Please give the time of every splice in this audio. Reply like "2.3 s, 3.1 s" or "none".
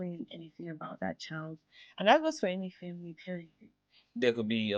3.5 s